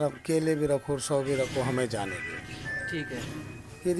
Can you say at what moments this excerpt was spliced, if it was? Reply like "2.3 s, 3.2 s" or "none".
none